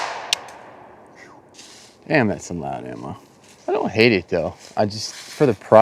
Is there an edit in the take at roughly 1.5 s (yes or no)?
yes